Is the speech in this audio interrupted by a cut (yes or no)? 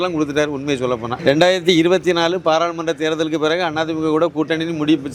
yes